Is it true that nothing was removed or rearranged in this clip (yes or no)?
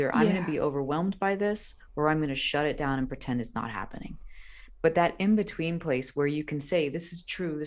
yes